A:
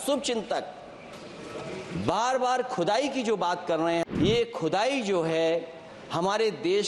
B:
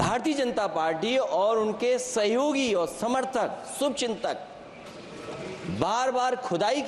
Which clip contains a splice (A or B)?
A